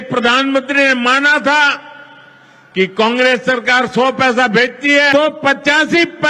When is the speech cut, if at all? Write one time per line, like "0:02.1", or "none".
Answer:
0:05.1